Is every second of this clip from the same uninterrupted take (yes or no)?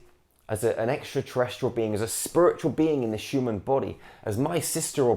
yes